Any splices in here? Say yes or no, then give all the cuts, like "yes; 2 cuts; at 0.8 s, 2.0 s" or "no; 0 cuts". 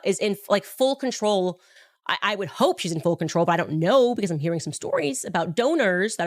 no; 0 cuts